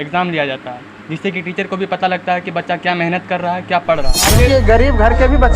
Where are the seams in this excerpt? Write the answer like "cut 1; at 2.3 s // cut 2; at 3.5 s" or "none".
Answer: cut 1; at 4.3 s